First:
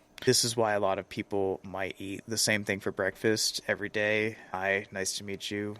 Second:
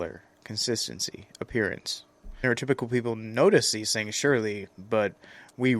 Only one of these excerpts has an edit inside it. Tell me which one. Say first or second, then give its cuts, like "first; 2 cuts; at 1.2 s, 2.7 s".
first; 1 cut; at 4.4 s